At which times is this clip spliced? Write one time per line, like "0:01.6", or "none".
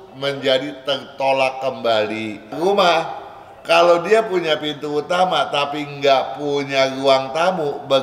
0:02.5